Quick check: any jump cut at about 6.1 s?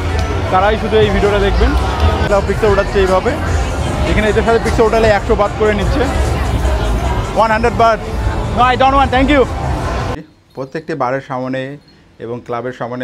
no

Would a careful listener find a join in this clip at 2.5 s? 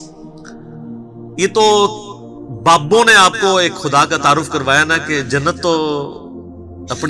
no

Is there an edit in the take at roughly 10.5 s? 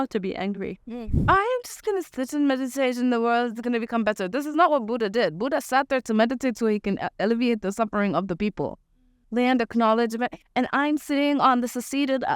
no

